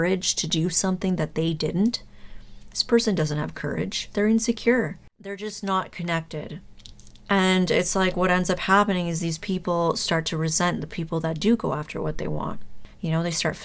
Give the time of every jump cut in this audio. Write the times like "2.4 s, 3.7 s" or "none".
5.0 s